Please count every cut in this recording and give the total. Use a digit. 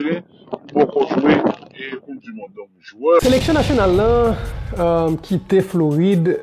1